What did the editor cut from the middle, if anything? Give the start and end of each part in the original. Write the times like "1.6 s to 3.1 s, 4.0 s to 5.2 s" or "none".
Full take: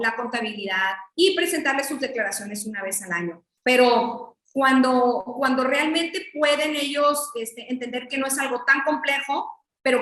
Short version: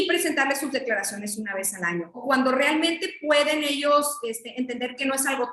3.4 s to 5.3 s